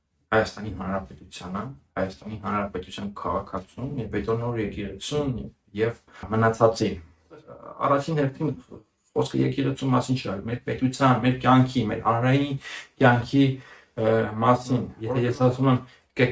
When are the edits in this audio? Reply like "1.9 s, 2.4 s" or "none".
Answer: 6.2 s, 7.6 s, 14.9 s